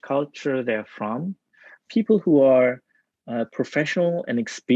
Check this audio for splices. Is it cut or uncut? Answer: uncut